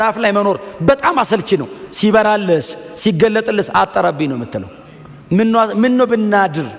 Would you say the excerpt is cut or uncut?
uncut